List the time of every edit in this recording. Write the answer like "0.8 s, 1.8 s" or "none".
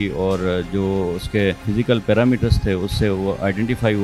1.6 s